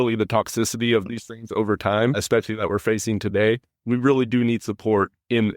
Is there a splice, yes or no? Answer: yes